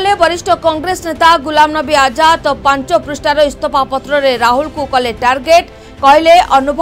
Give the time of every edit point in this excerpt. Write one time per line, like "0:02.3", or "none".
none